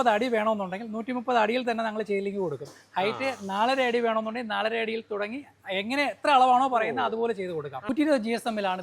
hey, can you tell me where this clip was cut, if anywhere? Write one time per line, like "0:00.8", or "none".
0:07.9